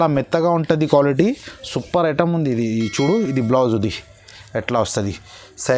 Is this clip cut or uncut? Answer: uncut